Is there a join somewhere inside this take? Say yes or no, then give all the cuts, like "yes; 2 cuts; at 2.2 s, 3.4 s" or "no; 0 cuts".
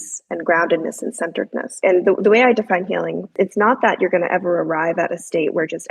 yes; 2 cuts; at 1.8 s, 3.3 s